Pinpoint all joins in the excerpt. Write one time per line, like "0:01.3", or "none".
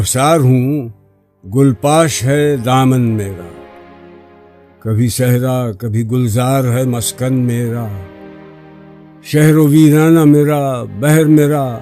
0:03.4
0:04.7